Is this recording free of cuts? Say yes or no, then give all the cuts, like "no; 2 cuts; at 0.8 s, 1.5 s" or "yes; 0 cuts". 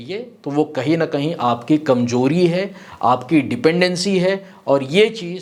yes; 0 cuts